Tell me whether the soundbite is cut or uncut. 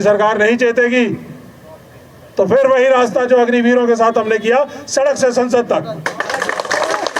uncut